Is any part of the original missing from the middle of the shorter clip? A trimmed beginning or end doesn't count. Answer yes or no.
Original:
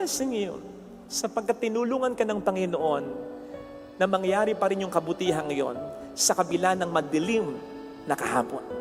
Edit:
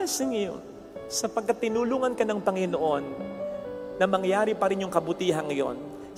no